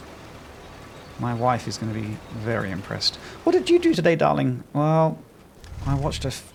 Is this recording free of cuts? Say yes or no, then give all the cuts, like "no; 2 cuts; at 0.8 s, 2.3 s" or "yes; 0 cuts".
yes; 0 cuts